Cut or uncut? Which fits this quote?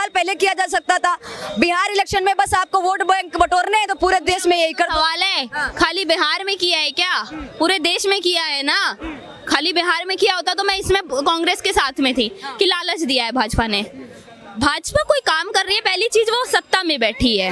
uncut